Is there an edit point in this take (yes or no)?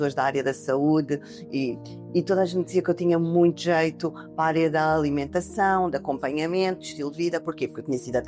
no